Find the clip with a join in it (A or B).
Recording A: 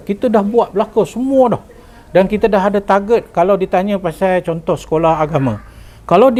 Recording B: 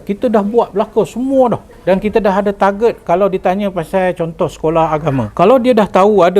B